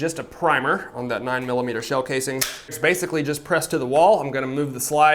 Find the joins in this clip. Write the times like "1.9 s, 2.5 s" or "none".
2.8 s